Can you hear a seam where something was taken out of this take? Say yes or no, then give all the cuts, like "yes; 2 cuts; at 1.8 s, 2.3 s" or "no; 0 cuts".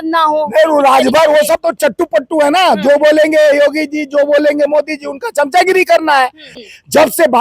yes; 1 cut; at 6.5 s